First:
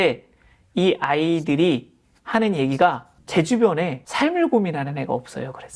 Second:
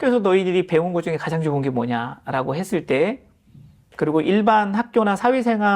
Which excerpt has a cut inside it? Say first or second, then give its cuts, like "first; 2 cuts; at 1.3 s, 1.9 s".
first; 2 cuts; at 3.1 s, 4.0 s